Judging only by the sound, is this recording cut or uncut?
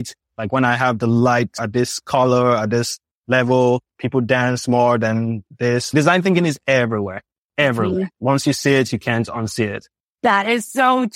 cut